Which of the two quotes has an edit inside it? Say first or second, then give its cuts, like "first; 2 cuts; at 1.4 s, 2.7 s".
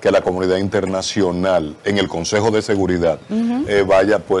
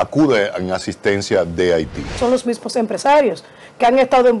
second; 1 cut; at 2.1 s